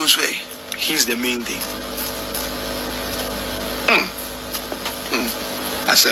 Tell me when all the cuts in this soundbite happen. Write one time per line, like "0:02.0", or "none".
none